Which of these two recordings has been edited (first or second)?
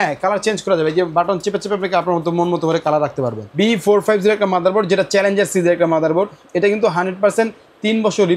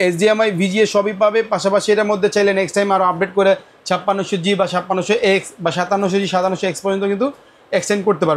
first